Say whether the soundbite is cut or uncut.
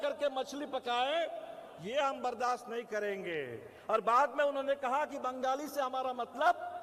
uncut